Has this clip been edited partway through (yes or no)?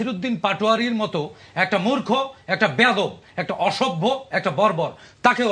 no